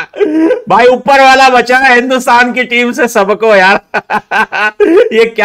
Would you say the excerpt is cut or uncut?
uncut